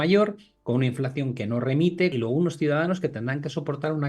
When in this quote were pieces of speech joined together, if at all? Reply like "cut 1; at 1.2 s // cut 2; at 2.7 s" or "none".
cut 1; at 2.1 s